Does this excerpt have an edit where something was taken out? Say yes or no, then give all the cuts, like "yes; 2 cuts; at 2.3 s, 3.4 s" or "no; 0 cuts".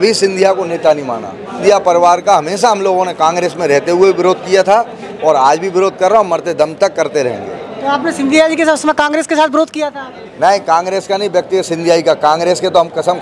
yes; 1 cut; at 1.6 s